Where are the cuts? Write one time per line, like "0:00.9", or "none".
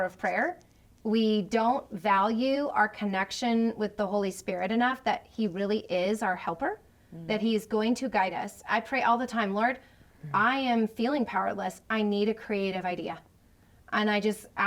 none